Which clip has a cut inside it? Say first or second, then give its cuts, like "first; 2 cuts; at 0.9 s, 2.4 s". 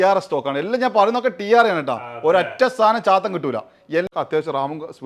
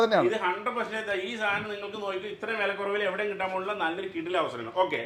first; 1 cut; at 4.1 s